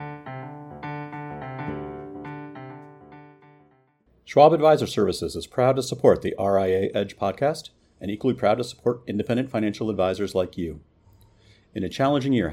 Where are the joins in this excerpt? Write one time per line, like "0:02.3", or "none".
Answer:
0:04.3